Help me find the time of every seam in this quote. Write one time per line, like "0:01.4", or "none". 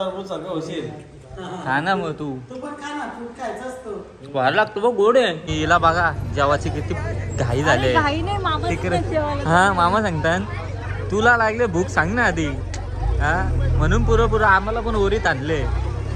0:05.4